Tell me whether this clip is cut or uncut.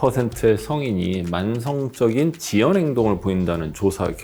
uncut